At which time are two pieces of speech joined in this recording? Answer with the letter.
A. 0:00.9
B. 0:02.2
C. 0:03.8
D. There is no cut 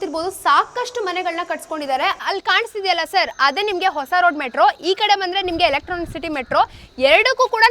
B